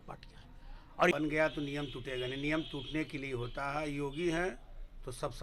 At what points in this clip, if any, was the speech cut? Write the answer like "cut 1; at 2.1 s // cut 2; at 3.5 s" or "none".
cut 1; at 1.1 s